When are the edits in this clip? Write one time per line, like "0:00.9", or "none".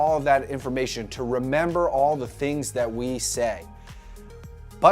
0:01.6